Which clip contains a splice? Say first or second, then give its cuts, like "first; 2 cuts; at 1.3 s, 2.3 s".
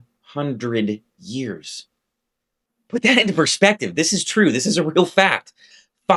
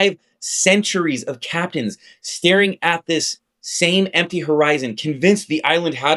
first; 1 cut; at 3.0 s